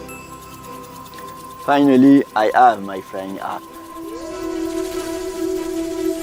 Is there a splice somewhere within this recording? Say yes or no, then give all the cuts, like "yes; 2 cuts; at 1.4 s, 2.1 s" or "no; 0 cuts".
no; 0 cuts